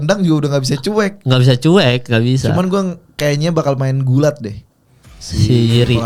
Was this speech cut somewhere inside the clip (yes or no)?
no